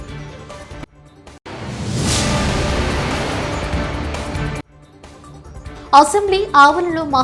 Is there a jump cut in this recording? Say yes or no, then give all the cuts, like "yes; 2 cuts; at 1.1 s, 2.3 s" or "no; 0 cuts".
yes; 2 cuts; at 1.4 s, 5.8 s